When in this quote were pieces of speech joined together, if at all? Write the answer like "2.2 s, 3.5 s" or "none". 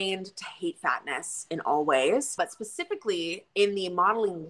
2.4 s